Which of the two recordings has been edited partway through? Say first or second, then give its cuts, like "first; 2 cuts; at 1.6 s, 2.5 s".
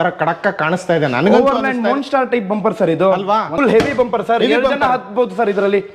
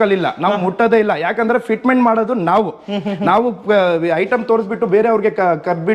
first; 1 cut; at 3.5 s